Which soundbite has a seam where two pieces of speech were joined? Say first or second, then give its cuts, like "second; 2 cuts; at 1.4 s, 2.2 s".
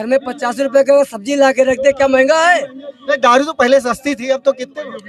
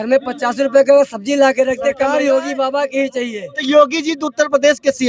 second; 1 cut; at 2.0 s